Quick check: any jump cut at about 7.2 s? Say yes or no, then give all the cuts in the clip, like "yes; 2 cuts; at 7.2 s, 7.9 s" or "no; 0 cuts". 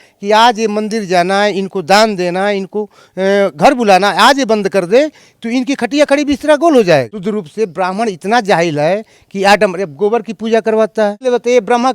yes; 2 cuts; at 7.2 s, 11.2 s